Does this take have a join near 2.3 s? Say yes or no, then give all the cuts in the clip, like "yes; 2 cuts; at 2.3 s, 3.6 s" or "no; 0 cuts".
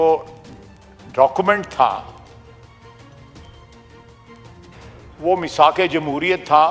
yes; 2 cuts; at 2.3 s, 5.2 s